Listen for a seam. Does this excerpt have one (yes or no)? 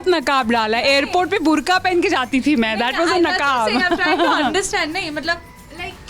no